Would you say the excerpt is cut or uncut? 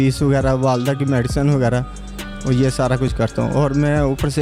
uncut